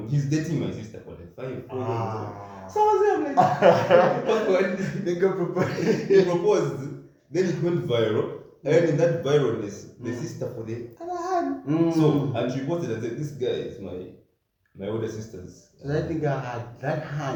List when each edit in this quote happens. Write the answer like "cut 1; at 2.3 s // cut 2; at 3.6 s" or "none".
none